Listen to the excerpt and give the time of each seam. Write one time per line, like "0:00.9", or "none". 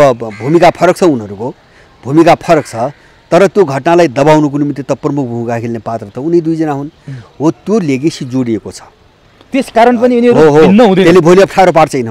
none